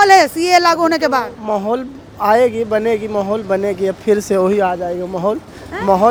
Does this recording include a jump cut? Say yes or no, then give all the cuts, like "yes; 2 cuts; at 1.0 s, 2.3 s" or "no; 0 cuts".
no; 0 cuts